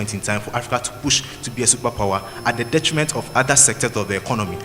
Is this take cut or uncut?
uncut